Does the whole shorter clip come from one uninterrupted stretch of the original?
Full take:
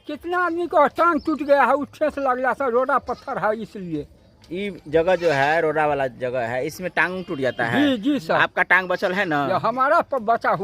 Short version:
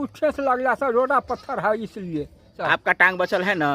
no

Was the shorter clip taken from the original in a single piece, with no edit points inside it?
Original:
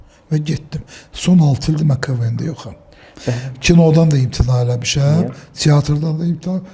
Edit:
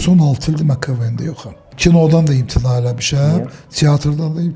no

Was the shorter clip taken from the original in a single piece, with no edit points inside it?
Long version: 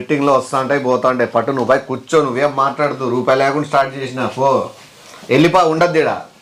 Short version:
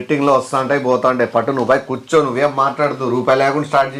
yes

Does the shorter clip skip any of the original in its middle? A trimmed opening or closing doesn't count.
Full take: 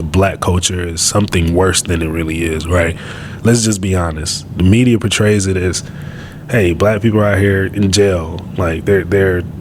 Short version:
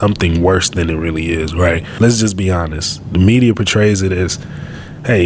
yes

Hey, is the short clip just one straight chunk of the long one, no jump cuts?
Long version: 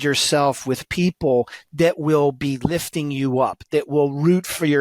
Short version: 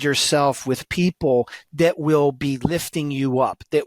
yes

